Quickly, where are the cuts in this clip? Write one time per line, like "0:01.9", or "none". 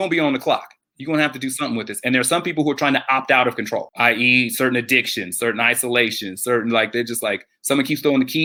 none